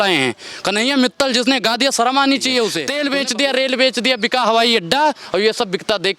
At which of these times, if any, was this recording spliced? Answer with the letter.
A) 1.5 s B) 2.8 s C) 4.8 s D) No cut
B